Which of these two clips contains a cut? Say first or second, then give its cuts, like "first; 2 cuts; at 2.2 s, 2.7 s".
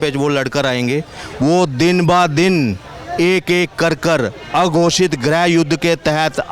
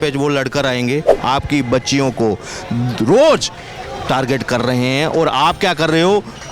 second; 1 cut; at 1.1 s